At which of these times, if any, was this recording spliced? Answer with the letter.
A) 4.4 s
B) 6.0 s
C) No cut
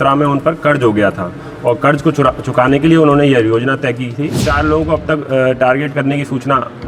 A